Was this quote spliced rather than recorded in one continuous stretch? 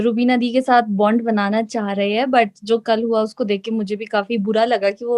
no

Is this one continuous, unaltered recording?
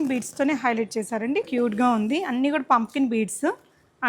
no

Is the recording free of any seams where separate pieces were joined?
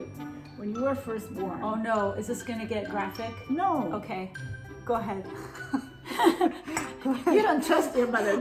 yes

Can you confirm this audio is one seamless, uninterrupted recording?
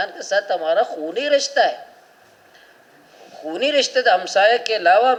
yes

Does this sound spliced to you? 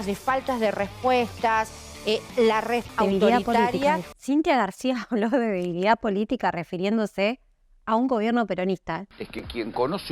yes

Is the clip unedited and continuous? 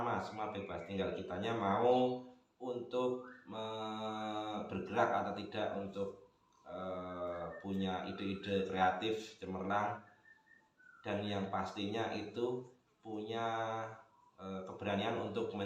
yes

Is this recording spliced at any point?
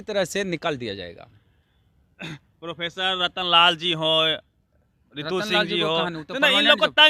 no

